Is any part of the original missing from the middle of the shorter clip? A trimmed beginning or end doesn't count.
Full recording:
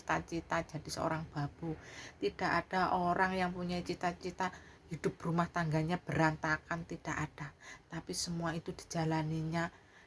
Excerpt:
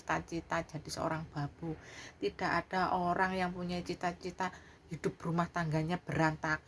no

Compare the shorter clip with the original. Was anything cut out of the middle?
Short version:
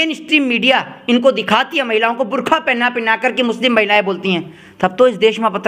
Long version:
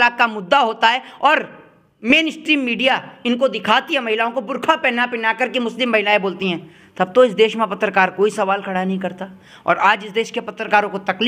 no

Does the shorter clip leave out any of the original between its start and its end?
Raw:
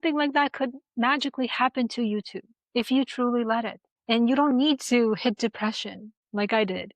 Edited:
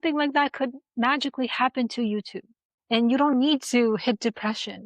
yes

